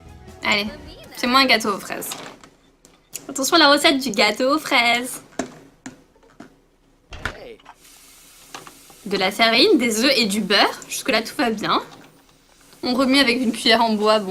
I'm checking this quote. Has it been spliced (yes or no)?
no